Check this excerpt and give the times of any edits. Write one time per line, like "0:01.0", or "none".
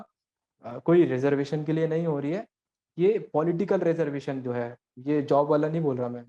none